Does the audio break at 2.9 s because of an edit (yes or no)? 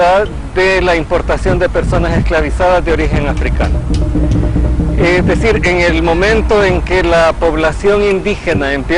yes